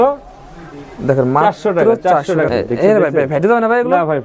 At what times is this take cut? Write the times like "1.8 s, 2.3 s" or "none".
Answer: 2.5 s